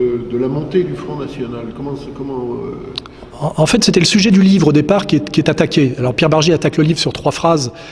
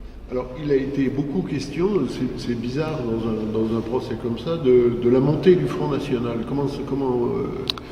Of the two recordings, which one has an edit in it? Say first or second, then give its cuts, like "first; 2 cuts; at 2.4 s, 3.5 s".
second; 1 cut; at 2.2 s